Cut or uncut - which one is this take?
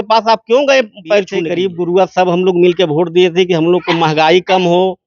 cut